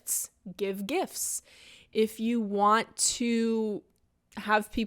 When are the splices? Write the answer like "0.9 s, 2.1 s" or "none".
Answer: none